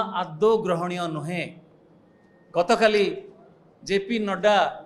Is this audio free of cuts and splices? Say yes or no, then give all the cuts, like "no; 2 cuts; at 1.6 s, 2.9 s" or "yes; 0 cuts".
yes; 0 cuts